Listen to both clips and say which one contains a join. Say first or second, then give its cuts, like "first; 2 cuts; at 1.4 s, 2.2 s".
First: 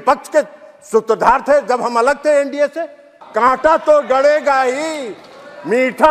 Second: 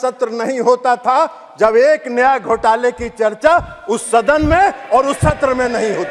first; 1 cut; at 3.2 s